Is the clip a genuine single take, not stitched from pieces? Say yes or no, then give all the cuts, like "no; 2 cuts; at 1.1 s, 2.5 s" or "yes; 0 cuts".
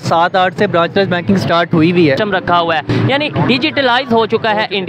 no; 1 cut; at 2.2 s